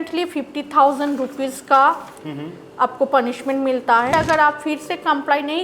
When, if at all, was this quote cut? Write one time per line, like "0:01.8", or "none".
0:04.1